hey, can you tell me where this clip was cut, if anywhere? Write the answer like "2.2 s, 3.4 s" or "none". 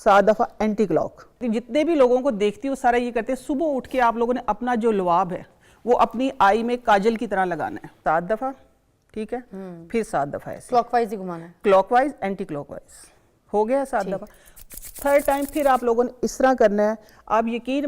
1.4 s, 7.9 s